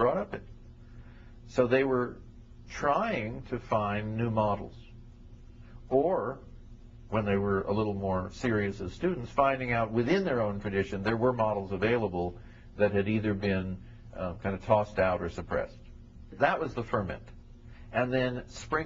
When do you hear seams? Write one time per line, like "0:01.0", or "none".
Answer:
0:15.0